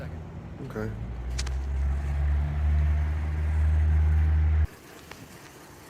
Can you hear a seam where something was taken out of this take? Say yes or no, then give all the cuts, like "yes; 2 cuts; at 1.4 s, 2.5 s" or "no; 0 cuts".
yes; 1 cut; at 4.7 s